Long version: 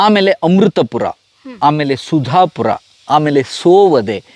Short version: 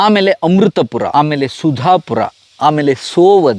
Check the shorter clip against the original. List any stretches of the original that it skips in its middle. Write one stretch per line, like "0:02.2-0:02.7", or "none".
0:01.1-0:01.6